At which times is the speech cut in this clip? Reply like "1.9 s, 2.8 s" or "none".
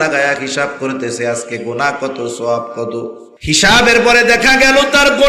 3.3 s